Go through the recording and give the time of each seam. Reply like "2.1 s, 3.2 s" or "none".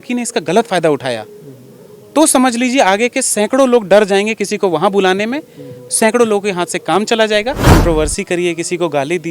7.8 s